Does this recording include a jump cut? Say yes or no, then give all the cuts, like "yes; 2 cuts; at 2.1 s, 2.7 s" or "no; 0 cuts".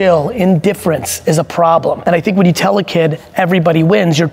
yes; 1 cut; at 2.0 s